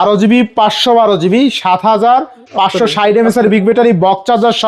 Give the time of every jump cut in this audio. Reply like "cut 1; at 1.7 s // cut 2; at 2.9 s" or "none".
none